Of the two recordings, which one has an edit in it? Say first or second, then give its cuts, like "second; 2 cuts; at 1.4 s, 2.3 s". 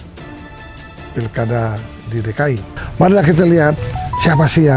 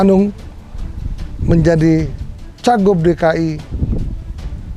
first; 1 cut; at 2.8 s